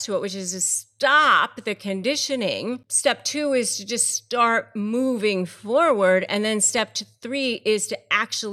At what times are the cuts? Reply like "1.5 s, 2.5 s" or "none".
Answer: 2.9 s